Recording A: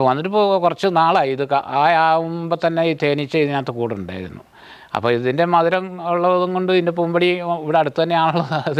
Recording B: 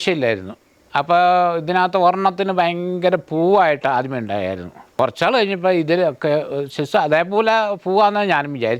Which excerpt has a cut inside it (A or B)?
B